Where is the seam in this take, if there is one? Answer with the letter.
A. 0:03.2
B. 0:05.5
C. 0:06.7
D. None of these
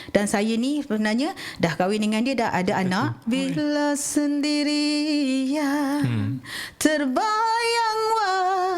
A